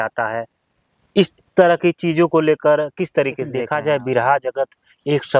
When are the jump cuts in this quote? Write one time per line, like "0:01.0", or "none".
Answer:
0:03.6